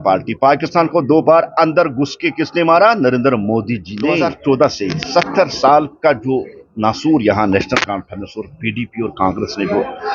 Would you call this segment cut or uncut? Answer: cut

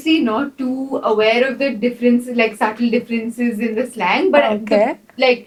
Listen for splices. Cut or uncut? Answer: uncut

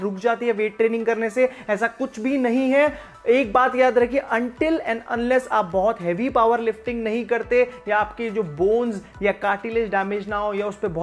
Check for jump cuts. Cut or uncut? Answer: uncut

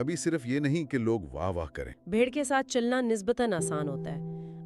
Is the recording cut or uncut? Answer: cut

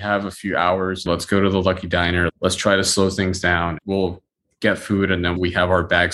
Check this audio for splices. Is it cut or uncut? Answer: cut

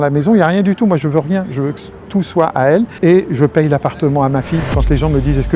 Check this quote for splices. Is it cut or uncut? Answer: cut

